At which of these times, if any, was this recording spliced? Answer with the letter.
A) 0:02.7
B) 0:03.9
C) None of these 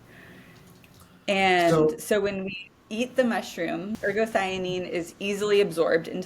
B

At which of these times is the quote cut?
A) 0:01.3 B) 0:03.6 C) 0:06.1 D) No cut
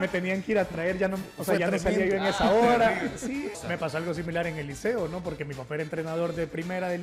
B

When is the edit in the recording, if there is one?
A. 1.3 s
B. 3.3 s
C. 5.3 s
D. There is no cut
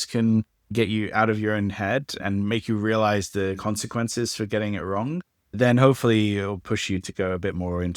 C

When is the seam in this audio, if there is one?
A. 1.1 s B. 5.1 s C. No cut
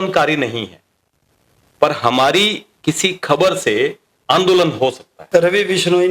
B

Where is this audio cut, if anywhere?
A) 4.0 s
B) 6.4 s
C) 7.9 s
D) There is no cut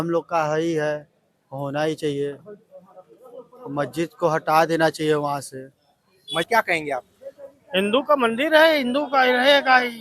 B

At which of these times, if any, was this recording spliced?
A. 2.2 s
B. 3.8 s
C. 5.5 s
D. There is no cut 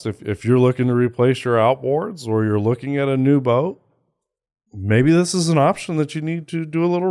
D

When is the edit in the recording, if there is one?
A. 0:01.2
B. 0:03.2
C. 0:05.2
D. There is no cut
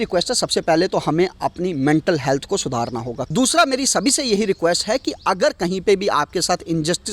B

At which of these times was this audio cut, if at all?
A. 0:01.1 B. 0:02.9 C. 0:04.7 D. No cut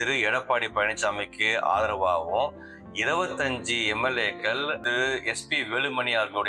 C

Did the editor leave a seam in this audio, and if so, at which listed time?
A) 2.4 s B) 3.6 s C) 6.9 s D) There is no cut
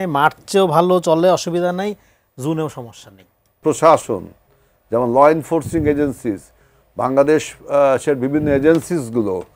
B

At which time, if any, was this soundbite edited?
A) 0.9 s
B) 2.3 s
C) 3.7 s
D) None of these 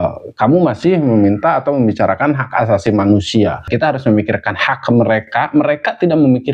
C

